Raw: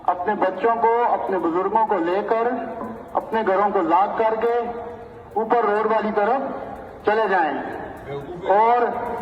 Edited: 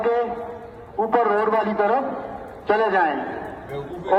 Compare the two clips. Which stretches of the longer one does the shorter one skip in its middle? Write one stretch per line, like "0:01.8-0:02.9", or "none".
none